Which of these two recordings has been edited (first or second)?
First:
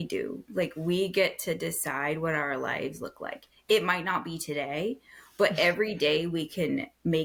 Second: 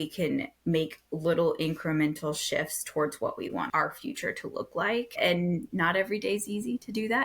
second